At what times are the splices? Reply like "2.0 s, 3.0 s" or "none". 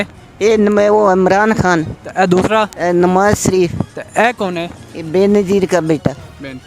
2.7 s